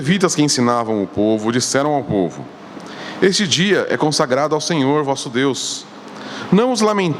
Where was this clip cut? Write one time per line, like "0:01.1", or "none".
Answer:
none